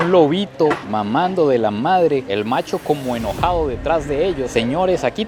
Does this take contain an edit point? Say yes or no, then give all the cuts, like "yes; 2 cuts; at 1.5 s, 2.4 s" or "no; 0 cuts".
no; 0 cuts